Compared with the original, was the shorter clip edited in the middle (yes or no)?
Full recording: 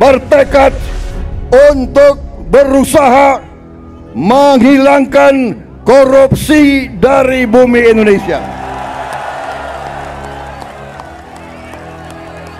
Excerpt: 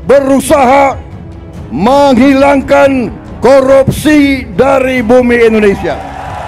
no